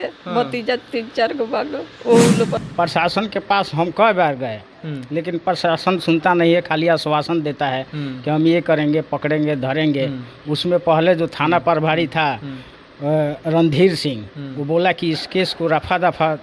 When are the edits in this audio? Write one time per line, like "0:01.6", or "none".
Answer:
0:02.6